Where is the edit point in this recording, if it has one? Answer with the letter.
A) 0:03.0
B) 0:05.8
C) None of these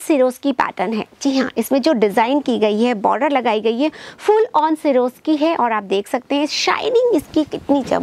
C